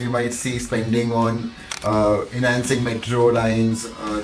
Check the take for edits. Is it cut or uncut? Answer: uncut